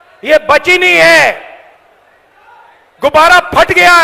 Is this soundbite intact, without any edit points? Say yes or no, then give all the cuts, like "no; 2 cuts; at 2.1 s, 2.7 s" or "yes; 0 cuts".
yes; 0 cuts